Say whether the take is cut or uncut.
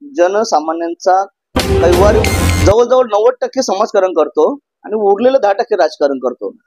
cut